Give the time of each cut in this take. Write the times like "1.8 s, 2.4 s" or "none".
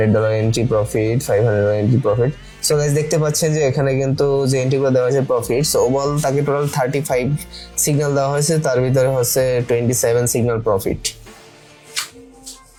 none